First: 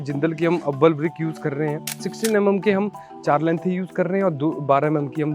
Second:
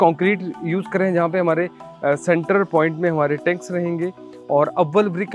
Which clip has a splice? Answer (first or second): first